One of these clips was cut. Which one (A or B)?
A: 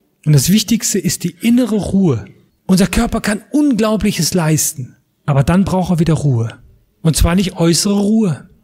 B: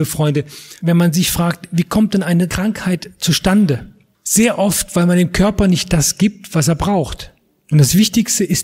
A